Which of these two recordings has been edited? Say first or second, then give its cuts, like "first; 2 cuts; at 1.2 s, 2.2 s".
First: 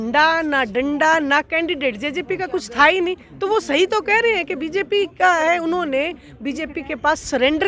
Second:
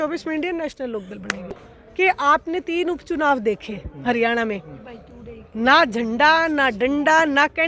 second; 1 cut; at 1.7 s